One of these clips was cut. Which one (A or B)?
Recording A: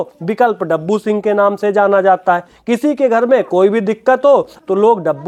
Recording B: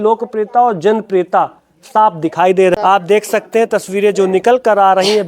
B